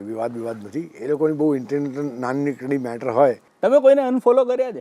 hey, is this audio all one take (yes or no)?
no